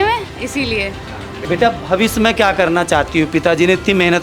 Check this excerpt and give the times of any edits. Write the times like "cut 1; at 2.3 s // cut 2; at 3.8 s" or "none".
cut 1; at 1.3 s